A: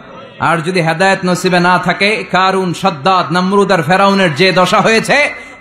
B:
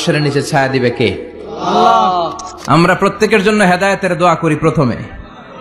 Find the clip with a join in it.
B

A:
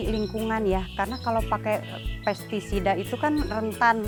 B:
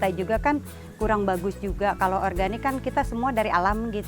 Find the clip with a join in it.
B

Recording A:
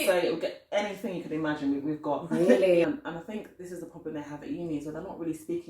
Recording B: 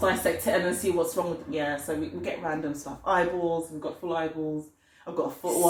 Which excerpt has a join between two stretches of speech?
A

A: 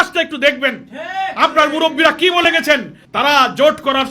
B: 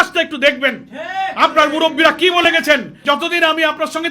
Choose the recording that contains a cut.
B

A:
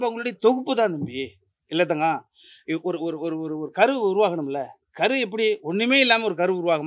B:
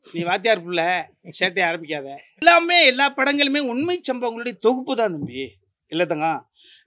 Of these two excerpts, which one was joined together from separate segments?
B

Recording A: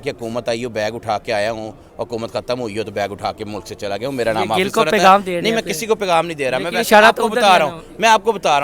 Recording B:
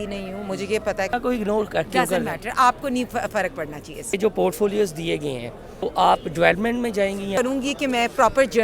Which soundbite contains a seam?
B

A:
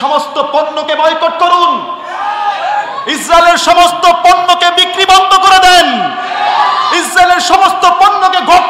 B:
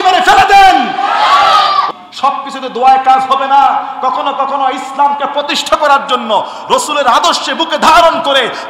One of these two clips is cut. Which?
B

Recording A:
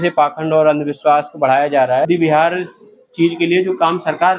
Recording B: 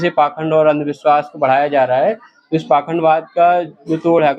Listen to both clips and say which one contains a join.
A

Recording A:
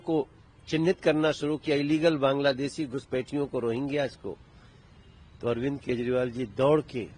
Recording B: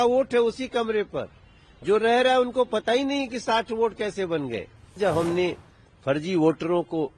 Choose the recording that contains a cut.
B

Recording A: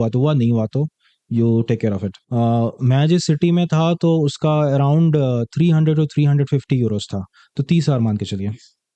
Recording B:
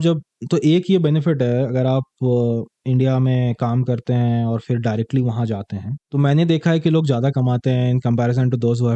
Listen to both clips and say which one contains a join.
A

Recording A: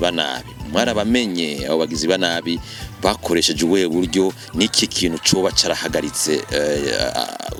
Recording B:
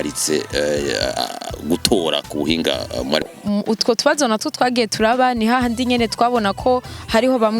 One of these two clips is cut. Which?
B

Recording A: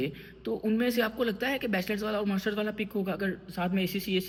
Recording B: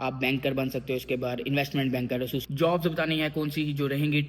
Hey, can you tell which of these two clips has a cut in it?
B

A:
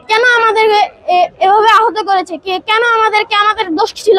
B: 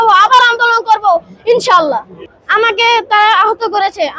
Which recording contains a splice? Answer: B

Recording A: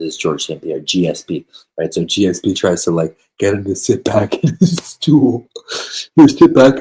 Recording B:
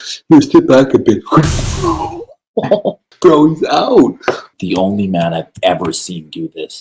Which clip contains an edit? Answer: B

